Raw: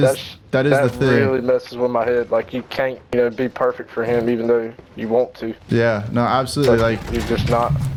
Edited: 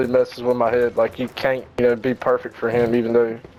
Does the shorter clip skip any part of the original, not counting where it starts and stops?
no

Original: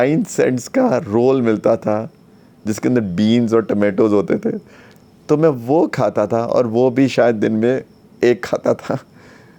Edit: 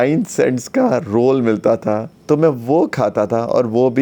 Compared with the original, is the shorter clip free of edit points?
no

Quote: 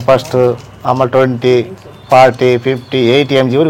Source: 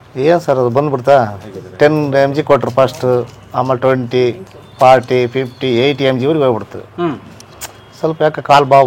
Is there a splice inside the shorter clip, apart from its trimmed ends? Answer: no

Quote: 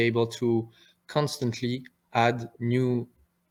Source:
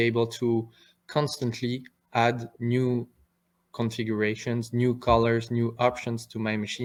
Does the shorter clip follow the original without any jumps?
yes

